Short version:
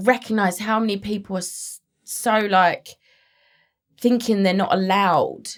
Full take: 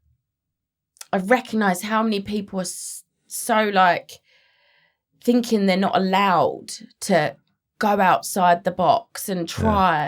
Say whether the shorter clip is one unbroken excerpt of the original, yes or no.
yes